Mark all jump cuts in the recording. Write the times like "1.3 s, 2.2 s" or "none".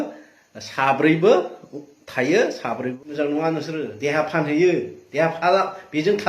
2.9 s